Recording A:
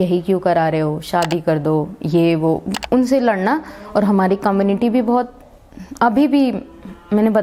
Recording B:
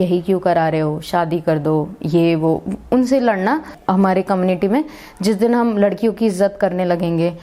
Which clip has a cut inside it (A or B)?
B